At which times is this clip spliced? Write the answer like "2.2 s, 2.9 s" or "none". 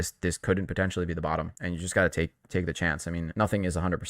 1.6 s, 3.3 s